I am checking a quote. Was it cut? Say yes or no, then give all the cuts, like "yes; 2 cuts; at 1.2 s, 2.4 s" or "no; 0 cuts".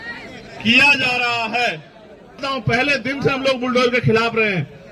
yes; 1 cut; at 2.4 s